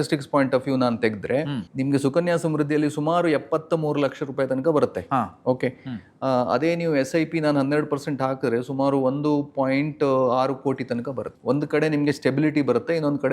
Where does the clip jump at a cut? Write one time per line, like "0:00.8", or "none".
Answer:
0:01.6
0:11.3

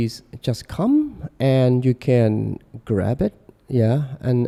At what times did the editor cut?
none

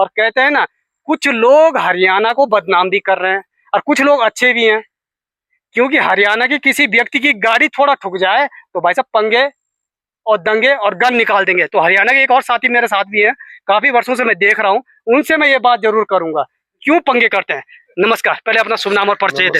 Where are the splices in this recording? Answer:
none

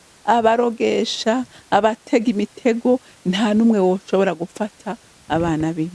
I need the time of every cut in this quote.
none

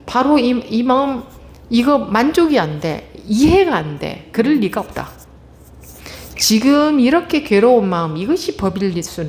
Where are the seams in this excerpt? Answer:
none

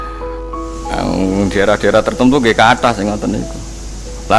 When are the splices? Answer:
0:00.9

